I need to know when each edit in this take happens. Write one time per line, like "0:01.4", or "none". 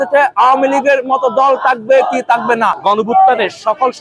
0:02.8